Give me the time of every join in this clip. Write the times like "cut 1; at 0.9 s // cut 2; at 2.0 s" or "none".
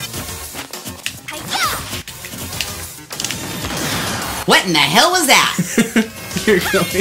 cut 1; at 3.2 s